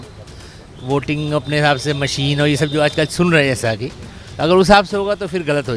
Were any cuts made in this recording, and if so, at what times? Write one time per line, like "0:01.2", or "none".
none